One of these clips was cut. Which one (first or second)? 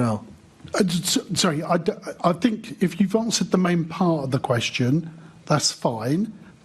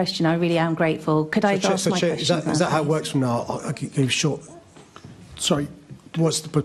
first